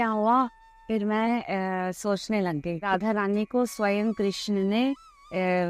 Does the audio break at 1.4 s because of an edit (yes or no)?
no